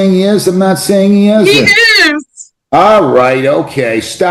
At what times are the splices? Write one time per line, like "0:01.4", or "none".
none